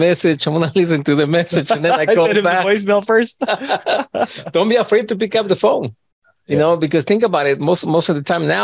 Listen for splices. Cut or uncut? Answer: uncut